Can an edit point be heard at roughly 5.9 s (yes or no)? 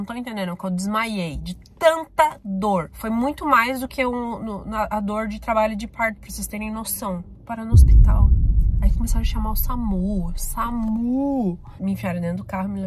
no